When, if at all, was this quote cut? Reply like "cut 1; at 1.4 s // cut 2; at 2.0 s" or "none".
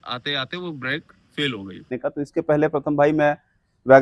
cut 1; at 2.0 s